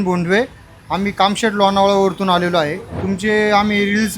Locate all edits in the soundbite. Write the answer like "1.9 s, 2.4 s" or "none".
2.9 s

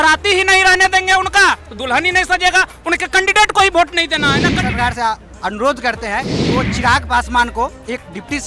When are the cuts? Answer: 4.6 s

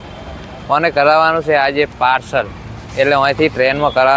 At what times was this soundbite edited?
none

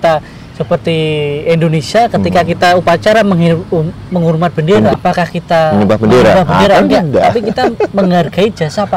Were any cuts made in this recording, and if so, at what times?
4.9 s

